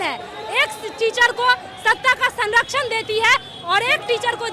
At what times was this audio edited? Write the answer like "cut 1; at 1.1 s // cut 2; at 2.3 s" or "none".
none